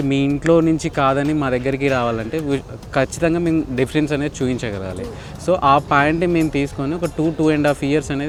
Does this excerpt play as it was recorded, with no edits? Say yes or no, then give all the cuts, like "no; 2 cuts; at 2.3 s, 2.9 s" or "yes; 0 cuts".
yes; 0 cuts